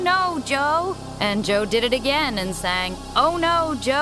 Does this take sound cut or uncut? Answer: cut